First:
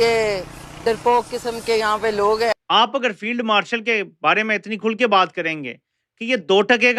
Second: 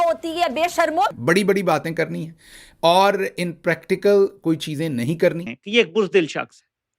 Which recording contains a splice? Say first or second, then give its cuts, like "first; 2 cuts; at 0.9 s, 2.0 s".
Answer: second; 2 cuts; at 1.1 s, 5.5 s